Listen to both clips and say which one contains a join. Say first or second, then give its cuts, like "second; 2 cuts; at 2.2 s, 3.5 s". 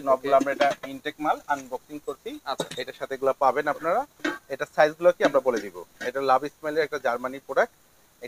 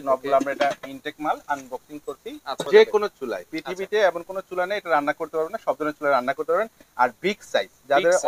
second; 1 cut; at 2.6 s